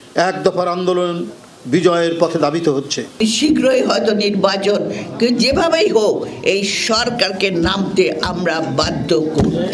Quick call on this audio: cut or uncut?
cut